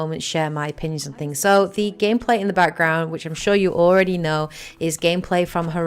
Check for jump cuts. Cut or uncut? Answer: cut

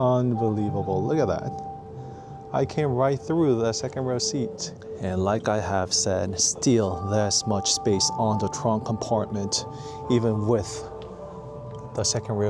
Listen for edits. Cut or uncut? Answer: uncut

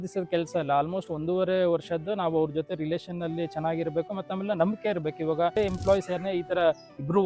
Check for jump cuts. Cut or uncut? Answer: cut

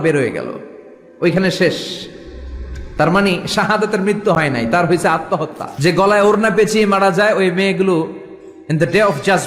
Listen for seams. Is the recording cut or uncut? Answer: cut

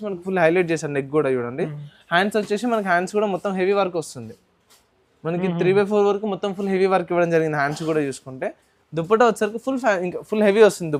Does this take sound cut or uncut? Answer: uncut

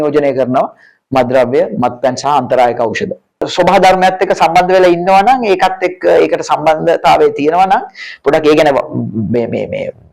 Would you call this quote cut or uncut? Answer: cut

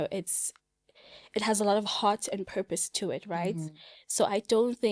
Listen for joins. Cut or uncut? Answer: uncut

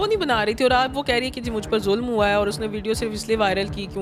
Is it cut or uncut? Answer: uncut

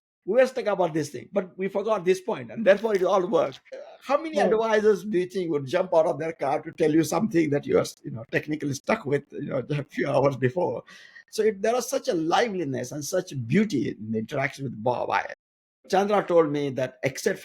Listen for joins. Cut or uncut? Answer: cut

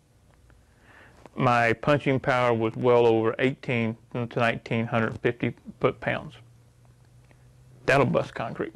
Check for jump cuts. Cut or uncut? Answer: uncut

